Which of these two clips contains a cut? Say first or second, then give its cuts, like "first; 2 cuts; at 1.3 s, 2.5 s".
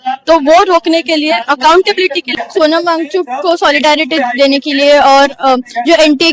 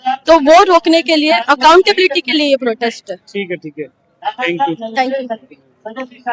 first; 1 cut; at 2.3 s